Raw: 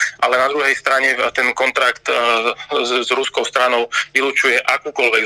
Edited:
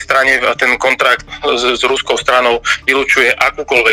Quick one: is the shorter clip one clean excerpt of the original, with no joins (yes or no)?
no